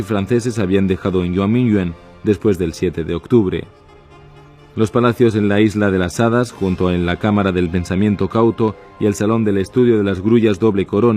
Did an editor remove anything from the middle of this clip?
yes; 1 cut; at 8.1 s

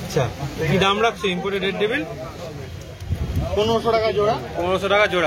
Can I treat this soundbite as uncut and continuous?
yes; 0 cuts

